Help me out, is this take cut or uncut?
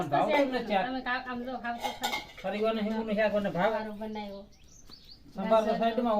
cut